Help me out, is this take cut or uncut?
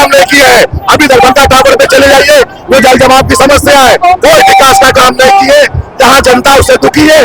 uncut